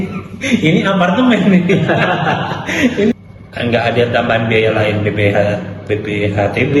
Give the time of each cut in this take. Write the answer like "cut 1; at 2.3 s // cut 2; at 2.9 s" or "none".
cut 1; at 3.1 s